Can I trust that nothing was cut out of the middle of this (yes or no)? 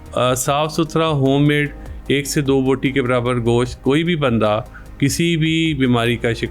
yes